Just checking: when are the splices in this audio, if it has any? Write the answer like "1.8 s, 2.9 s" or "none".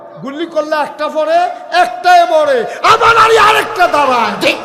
none